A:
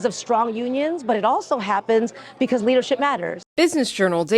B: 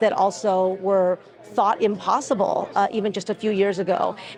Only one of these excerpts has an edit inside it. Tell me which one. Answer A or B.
A